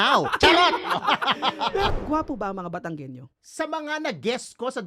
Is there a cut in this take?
yes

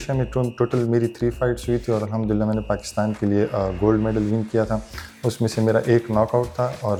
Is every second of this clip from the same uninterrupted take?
yes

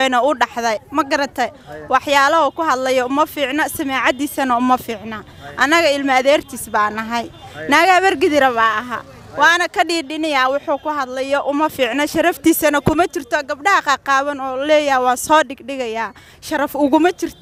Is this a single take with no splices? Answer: yes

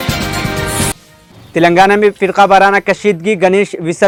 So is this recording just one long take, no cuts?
yes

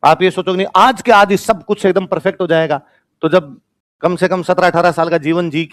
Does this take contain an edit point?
no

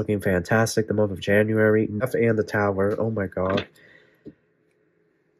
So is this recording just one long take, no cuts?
no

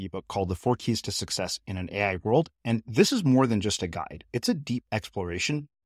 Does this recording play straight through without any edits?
yes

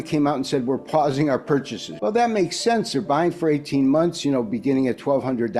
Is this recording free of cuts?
no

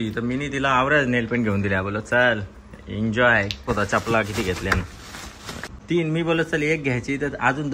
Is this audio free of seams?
no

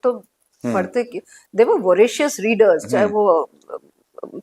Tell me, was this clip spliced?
no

